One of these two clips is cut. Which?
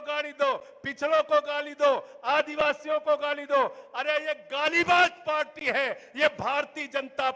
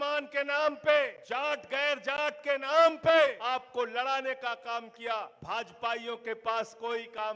second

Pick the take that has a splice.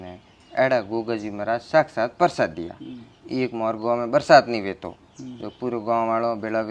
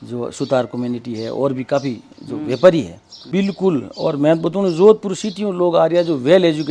second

